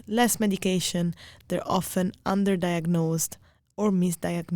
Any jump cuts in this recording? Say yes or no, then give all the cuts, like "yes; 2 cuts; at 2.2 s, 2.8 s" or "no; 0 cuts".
no; 0 cuts